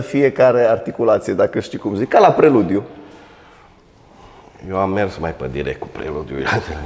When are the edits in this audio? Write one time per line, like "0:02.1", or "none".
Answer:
none